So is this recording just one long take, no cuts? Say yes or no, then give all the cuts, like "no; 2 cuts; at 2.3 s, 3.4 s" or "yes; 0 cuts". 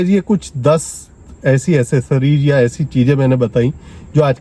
yes; 0 cuts